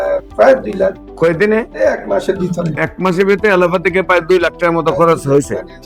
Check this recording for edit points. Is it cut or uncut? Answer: uncut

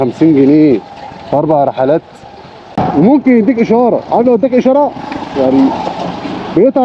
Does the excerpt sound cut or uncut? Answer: cut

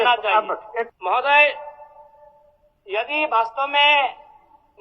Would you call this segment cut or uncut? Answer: cut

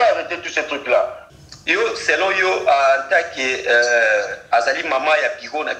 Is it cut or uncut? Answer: cut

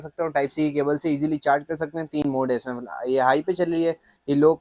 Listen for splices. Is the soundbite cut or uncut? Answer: uncut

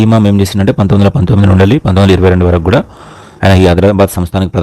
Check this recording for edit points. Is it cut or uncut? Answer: uncut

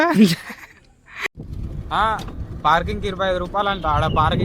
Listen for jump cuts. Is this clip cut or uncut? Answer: cut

